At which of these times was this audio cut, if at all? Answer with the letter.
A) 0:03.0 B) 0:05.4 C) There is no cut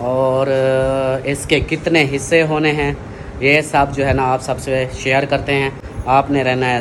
C